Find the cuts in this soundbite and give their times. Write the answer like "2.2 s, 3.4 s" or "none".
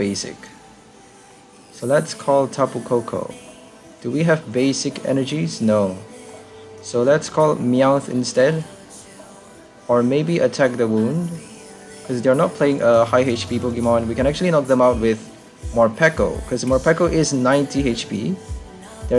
none